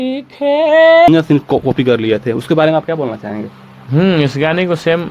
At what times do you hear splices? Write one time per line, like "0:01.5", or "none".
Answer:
0:01.1